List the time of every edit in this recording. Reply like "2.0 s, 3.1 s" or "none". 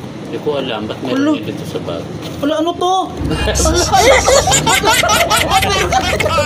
none

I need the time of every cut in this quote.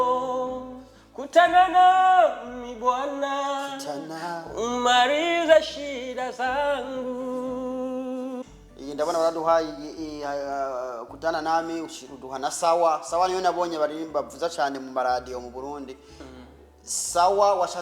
8.4 s

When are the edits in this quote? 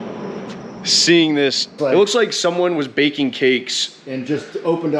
1.8 s

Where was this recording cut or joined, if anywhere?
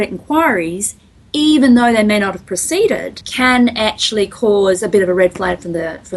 3.2 s

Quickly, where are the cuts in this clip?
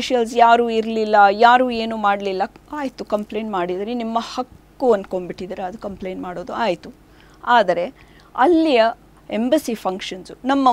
none

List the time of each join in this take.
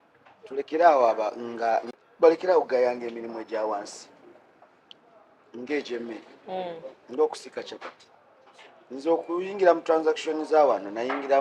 1.9 s

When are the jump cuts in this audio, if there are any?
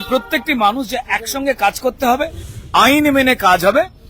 2.5 s

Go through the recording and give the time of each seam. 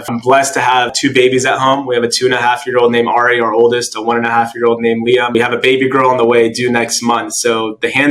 none

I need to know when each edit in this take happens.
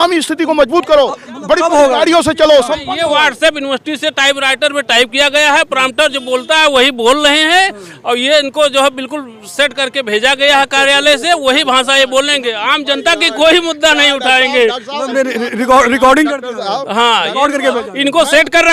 none

